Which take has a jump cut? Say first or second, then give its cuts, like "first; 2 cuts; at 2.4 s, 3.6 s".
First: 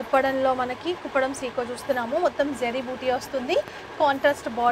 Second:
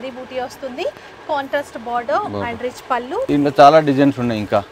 second; 1 cut; at 3.2 s